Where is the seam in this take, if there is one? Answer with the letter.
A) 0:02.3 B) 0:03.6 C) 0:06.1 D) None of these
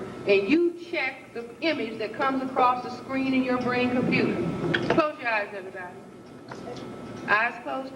D